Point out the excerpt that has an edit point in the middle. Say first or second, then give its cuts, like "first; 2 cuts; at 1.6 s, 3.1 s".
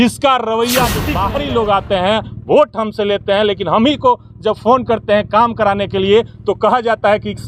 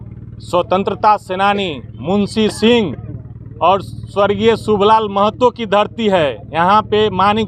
first; 1 cut; at 1.1 s